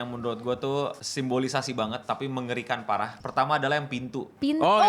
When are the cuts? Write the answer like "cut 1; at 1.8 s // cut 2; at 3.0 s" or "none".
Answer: cut 1; at 1.0 s // cut 2; at 3.2 s